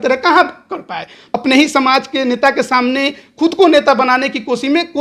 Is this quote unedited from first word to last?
no; 1 cut; at 1.3 s

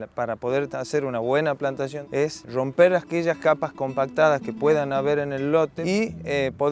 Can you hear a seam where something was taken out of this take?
yes; 2 cuts; at 2.1 s, 5.8 s

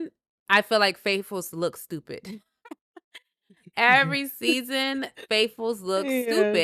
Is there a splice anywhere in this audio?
no; 0 cuts

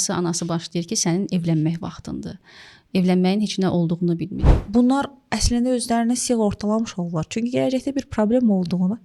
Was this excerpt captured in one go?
no; 1 cut; at 4.4 s

